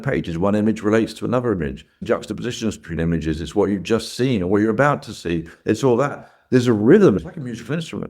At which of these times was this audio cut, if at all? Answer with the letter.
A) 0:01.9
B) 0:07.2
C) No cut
B